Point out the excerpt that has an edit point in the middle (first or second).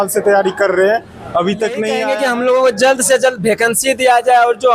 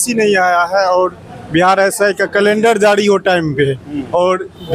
first